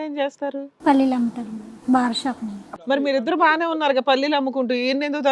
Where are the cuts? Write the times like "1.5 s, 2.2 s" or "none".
2.6 s

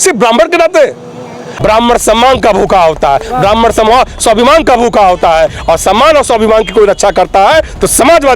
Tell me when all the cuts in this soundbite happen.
1.5 s

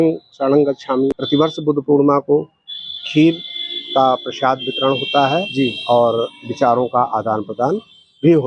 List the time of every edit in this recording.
1.2 s

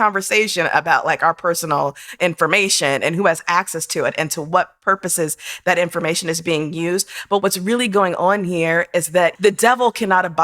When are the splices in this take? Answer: 2.2 s, 7.4 s, 9.4 s

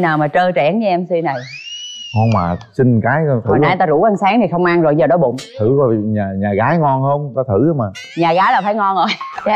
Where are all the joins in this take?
none

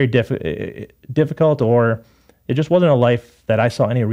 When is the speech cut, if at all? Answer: none

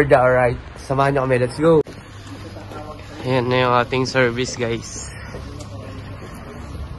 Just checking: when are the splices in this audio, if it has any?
1.9 s

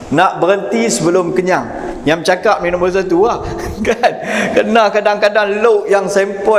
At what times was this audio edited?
none

